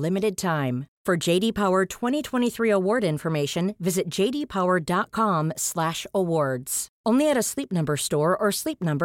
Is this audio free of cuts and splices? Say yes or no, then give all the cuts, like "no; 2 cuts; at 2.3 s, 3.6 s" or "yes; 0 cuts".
yes; 0 cuts